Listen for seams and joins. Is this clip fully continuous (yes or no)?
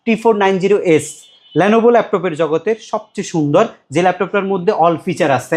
yes